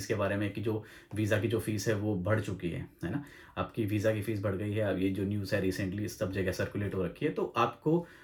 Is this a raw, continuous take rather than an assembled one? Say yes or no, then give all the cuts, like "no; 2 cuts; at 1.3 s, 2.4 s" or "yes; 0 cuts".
yes; 0 cuts